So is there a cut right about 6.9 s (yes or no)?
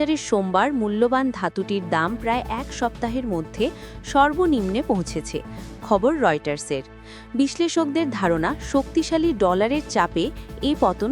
no